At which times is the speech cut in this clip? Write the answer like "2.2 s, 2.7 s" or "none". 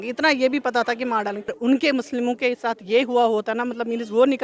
1.6 s